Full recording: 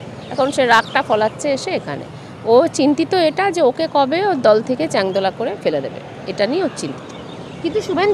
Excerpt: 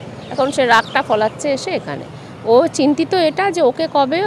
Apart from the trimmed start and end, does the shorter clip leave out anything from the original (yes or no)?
no